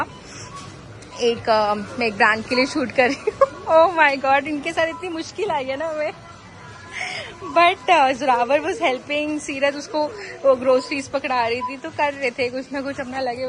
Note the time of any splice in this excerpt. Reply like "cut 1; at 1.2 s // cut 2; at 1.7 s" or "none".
none